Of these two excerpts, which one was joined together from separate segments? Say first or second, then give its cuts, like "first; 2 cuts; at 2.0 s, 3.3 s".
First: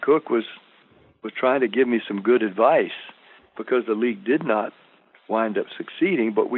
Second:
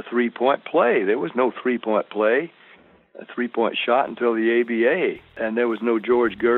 second; 1 cut; at 5.3 s